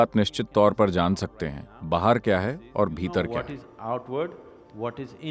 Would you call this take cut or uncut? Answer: uncut